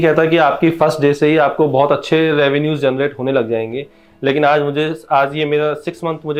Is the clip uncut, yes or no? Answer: yes